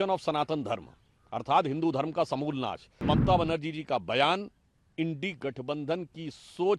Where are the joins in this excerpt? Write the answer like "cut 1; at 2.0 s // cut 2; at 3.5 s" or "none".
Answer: cut 1; at 2.9 s